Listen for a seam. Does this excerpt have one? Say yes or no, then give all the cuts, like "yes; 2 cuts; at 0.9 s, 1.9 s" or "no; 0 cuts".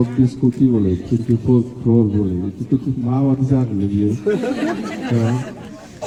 no; 0 cuts